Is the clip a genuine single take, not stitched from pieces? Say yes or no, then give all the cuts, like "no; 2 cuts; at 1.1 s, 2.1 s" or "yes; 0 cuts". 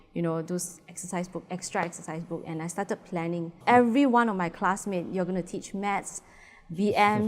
no; 1 cut; at 3.6 s